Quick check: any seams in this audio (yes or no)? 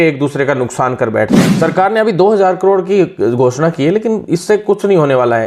yes